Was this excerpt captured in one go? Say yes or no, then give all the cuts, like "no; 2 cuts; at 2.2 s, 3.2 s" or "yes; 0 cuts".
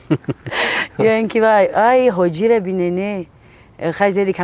yes; 0 cuts